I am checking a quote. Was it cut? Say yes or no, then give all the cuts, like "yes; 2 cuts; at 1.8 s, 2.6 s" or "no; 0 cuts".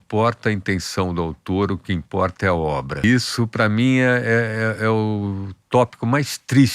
yes; 1 cut; at 3.0 s